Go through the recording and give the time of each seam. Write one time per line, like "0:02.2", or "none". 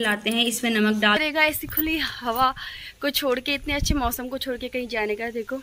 0:01.2